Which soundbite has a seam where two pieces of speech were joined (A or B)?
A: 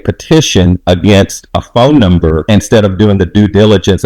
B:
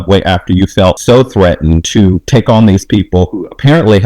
B